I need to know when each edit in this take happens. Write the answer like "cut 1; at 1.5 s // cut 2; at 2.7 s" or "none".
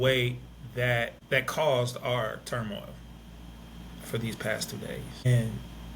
cut 1; at 1.2 s // cut 2; at 5.3 s